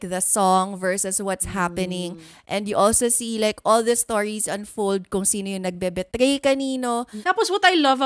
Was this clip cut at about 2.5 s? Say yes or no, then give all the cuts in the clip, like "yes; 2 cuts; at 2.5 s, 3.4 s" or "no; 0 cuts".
no; 1 cut; at 7.1 s